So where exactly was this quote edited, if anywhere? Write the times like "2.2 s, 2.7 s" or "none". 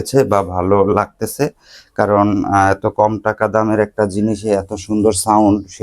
none